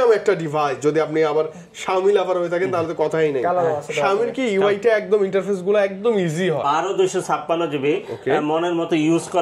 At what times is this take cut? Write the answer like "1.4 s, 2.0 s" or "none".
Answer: 6.6 s